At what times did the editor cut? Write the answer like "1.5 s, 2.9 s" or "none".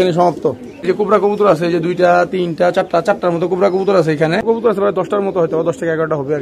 1.0 s, 4.4 s